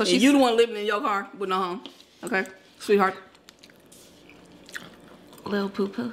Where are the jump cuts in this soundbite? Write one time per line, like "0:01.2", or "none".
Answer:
none